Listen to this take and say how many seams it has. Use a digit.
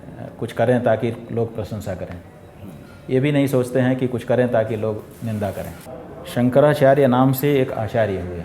1